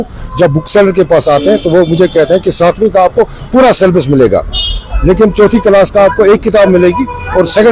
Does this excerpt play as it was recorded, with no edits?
yes; 0 cuts

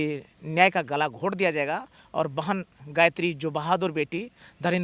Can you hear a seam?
no; 0 cuts

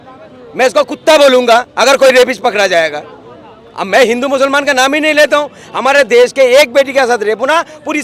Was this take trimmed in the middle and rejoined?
no; 0 cuts

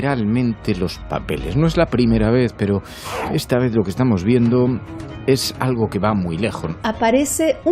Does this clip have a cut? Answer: yes; 1 cut; at 6.7 s

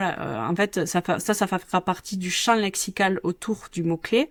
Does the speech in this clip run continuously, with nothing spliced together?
yes; 0 cuts

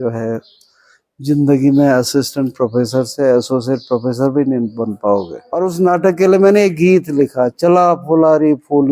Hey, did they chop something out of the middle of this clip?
yes; 1 cut; at 5.4 s

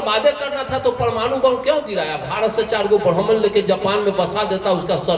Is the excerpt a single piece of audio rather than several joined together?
yes; 0 cuts

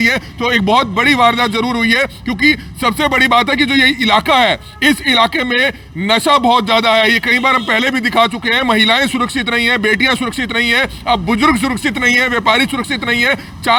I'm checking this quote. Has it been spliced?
no; 0 cuts

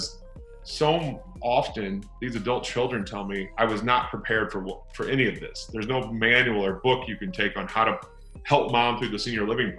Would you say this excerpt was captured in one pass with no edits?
no; 1 cut; at 3.5 s

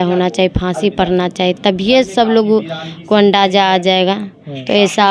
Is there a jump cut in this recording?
no; 0 cuts

